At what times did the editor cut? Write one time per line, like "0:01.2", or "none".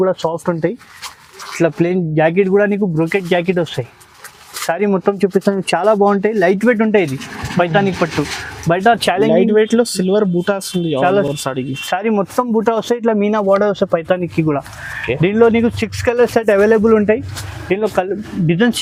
none